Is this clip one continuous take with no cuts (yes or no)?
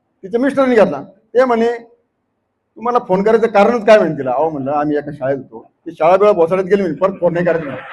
no